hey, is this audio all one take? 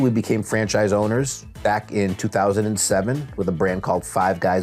no; 1 cut; at 1.4 s

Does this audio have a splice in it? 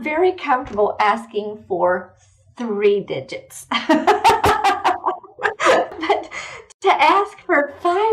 yes; 1 cut; at 6.0 s

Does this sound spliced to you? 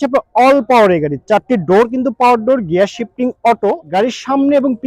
yes; 1 cut; at 3.8 s

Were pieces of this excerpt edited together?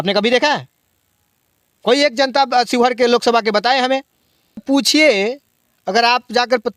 yes; 1 cut; at 4.6 s

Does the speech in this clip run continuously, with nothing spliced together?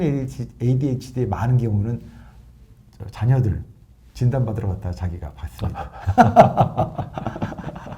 yes; 0 cuts

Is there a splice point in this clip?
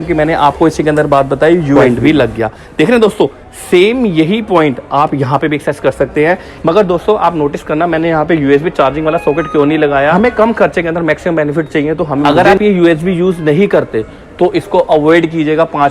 yes; 4 cuts; at 1.8 s, 6.5 s, 10.1 s, 12.2 s

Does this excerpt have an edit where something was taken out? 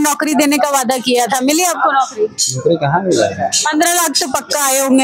no; 0 cuts

